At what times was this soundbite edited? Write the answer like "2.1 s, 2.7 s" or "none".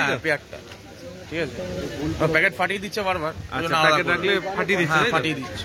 none